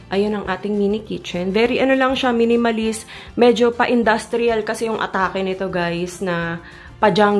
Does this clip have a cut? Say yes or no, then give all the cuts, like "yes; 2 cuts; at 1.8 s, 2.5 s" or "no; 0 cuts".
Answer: no; 0 cuts